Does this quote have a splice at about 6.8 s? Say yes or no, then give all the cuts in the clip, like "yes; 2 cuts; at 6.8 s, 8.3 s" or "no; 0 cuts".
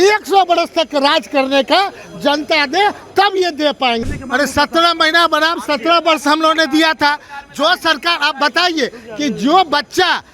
no; 1 cut; at 4.0 s